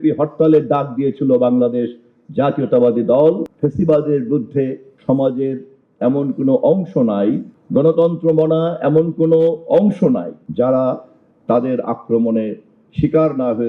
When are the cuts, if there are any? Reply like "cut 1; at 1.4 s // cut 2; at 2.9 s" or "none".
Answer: cut 1; at 3.5 s